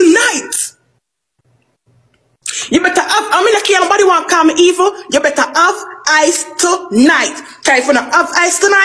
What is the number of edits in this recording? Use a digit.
0